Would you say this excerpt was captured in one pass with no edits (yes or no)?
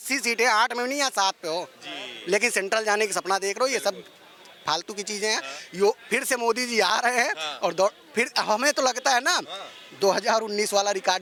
yes